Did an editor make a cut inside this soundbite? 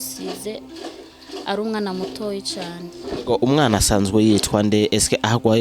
yes; 1 cut; at 3.0 s

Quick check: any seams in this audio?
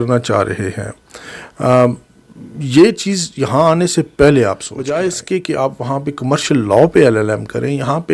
yes; 1 cut; at 4.8 s

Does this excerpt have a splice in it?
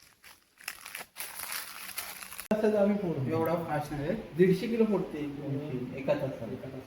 yes; 1 cut; at 2.5 s

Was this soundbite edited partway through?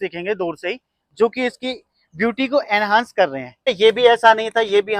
yes; 1 cut; at 3.7 s

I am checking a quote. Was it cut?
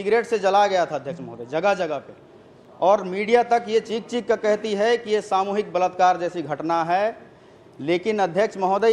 no; 0 cuts

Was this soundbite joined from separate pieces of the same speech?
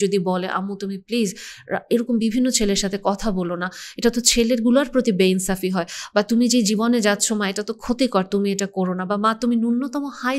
no; 0 cuts

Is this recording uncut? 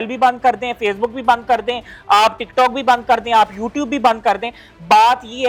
yes; 0 cuts

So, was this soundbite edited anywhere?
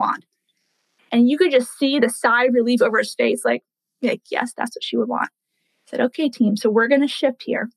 no; 0 cuts

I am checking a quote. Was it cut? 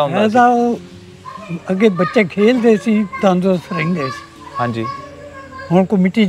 no; 0 cuts

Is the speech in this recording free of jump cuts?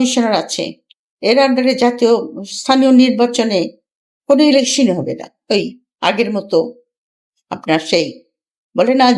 no; 1 cut; at 5.3 s

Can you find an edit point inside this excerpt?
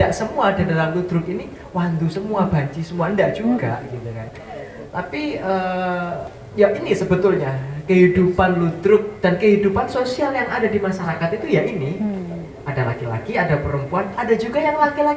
yes; 1 cut; at 6.4 s

